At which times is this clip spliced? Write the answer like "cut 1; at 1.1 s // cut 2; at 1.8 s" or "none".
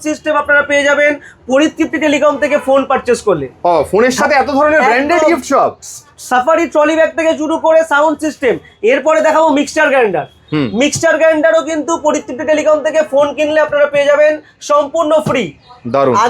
none